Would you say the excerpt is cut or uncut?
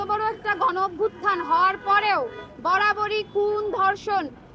uncut